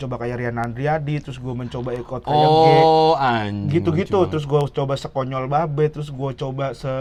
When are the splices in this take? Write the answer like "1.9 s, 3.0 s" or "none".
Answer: none